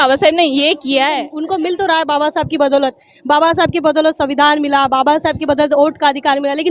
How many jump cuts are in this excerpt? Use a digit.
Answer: 1